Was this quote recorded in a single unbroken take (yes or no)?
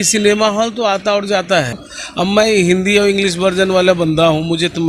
no